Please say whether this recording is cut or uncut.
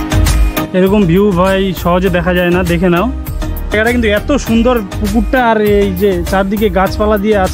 uncut